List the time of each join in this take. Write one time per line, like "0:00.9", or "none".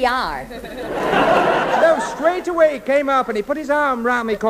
0:01.7